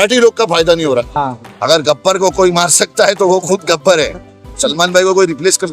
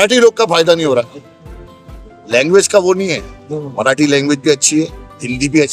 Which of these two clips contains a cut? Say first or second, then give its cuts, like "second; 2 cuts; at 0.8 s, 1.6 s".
first; 2 cuts; at 1.1 s, 4.4 s